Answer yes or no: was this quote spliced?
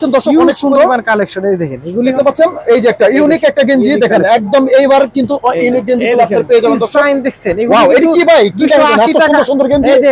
yes